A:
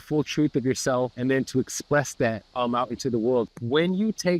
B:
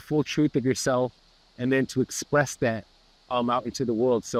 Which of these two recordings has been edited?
A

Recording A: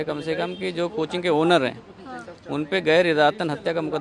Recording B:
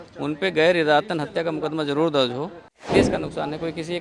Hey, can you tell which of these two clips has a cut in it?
B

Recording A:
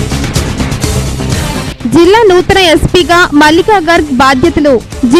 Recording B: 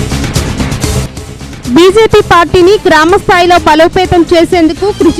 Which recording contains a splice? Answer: B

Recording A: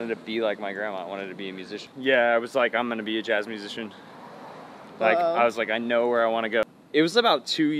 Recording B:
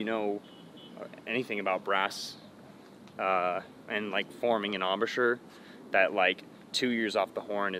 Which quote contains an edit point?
A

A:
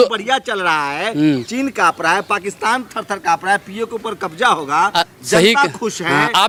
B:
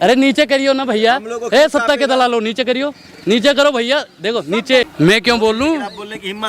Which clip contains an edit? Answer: B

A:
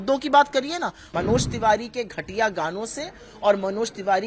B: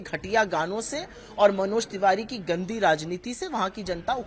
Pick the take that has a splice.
A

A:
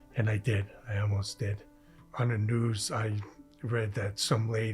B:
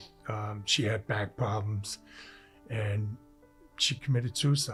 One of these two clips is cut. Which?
A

